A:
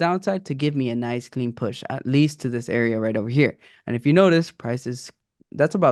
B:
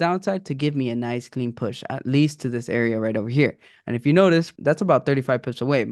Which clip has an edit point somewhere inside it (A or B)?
B